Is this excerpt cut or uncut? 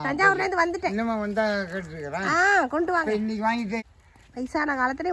cut